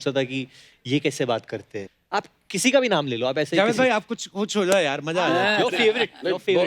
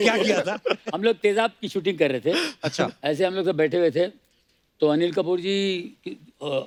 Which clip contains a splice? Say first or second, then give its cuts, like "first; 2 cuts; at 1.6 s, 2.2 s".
first; 1 cut; at 1.8 s